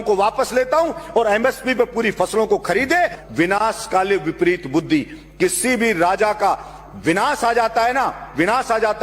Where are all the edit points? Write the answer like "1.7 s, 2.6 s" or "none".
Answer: 3.2 s